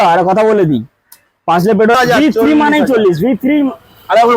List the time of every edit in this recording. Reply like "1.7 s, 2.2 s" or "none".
1.9 s

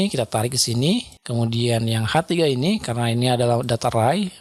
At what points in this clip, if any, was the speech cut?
1.2 s

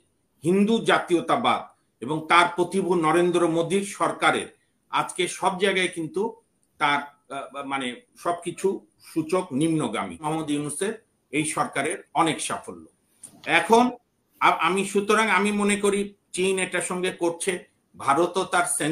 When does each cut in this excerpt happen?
10.3 s

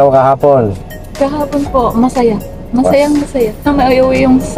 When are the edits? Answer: 3.6 s

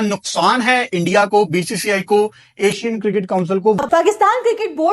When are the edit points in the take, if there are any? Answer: 3.8 s

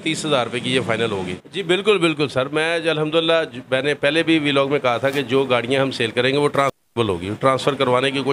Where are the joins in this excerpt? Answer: 1.4 s

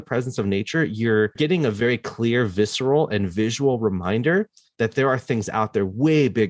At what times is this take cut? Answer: 1.3 s

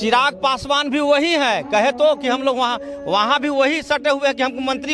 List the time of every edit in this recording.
none

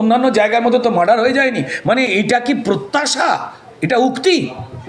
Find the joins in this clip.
none

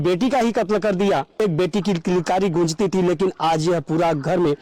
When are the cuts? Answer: 1.4 s

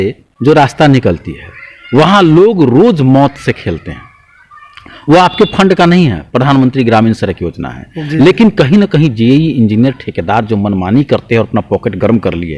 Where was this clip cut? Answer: none

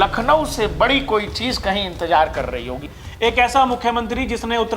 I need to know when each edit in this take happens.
2.8 s

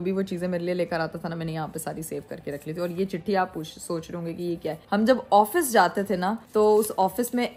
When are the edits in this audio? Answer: none

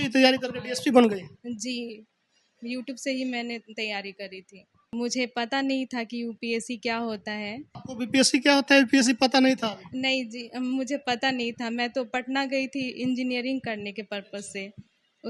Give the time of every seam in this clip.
4.9 s, 7.8 s

